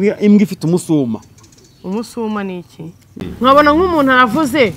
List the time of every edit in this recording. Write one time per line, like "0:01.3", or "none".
0:03.2

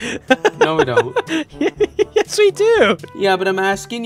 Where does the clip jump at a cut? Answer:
0:01.4
0:03.1

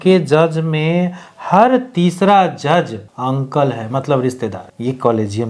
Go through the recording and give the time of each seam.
none

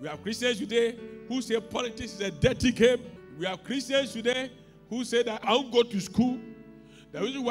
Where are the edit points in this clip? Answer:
0:03.2
0:05.4

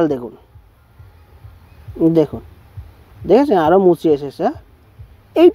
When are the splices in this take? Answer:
none

